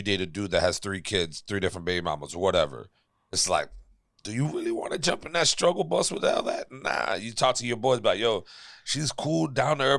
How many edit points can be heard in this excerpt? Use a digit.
0